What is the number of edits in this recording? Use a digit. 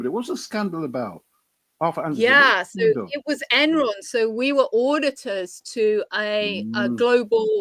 0